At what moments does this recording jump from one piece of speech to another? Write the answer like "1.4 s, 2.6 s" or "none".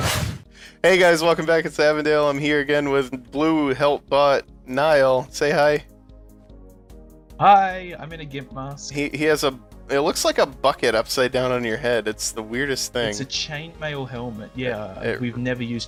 none